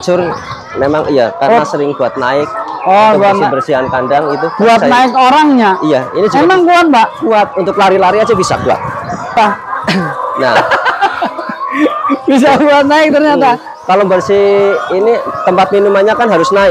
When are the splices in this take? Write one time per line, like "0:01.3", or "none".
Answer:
0:09.4